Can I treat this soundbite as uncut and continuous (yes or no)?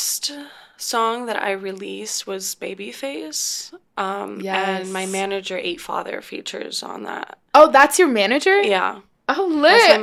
yes